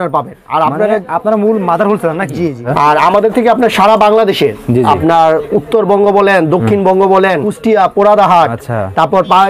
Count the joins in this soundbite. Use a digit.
2